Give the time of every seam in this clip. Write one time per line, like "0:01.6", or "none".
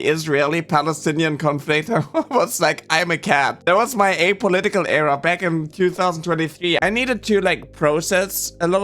0:06.8